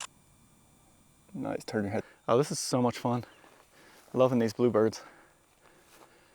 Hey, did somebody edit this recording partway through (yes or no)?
yes